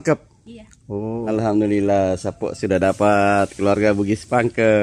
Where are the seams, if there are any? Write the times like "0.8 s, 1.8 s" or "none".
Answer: 1.3 s